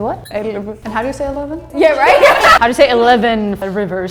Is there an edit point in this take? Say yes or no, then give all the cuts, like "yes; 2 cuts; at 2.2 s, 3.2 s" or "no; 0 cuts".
no; 0 cuts